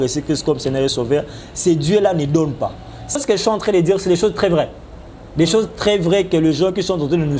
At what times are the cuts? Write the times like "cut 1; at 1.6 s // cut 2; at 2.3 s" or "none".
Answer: cut 1; at 3.2 s